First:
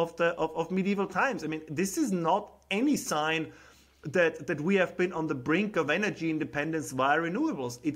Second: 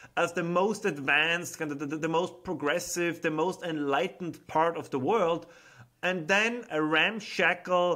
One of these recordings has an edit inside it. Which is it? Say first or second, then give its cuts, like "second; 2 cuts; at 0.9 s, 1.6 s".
second; 1 cut; at 6.6 s